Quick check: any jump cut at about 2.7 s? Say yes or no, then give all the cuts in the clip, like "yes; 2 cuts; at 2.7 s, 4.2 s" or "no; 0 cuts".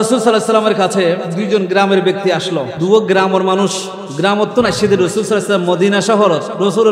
yes; 2 cuts; at 1.3 s, 2.7 s